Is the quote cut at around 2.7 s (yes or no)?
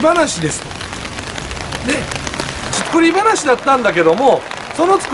yes